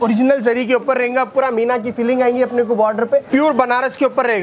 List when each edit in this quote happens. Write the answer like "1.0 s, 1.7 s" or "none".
3.3 s